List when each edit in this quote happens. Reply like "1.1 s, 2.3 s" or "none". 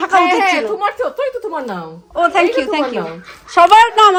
none